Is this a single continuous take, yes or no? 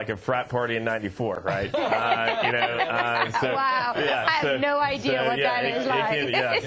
yes